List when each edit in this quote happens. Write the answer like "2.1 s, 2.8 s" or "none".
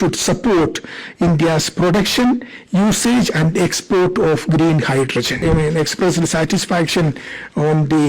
5.4 s